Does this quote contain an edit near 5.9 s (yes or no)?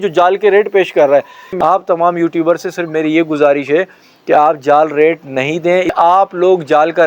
yes